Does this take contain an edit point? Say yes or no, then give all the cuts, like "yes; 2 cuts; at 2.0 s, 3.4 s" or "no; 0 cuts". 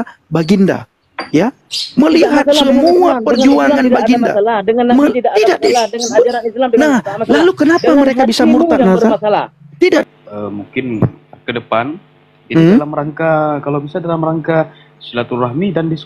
yes; 1 cut; at 10.0 s